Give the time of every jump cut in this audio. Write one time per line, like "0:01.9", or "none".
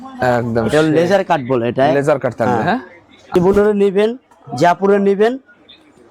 0:03.2